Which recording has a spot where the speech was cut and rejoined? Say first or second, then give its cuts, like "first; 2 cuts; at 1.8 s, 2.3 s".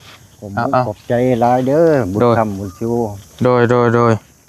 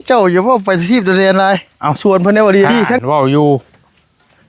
second; 1 cut; at 2.0 s